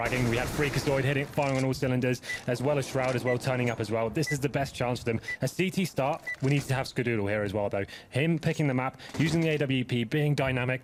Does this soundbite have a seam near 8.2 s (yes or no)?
no